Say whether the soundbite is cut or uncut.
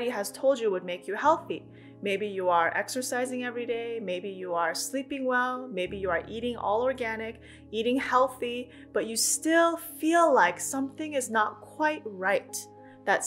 uncut